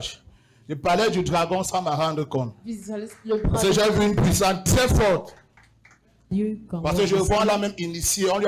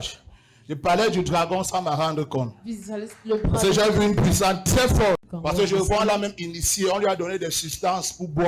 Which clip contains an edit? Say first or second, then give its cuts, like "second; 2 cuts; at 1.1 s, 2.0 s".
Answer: second; 1 cut; at 5.3 s